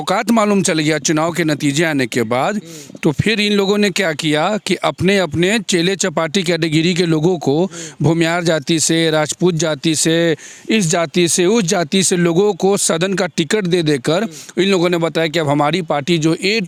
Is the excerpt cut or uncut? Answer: uncut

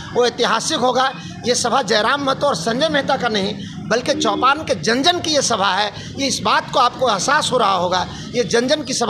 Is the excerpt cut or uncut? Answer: uncut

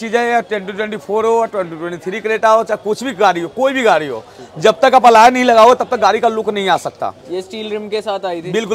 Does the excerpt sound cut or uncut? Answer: uncut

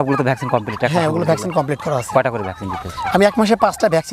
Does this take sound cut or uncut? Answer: uncut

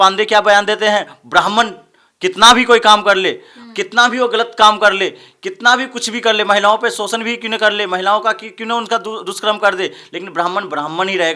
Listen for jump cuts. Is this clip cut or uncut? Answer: uncut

